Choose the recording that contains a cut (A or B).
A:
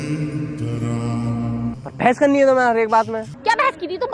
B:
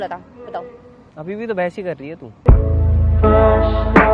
A